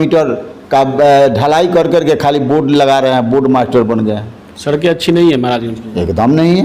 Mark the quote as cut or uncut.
uncut